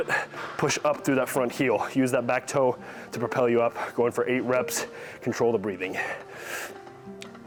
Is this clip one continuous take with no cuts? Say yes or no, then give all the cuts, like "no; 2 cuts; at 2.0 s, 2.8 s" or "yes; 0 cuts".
yes; 0 cuts